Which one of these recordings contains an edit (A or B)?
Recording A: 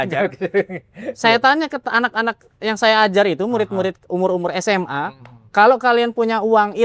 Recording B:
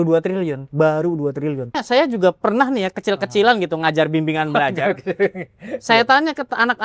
B